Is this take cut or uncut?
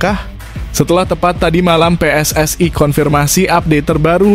uncut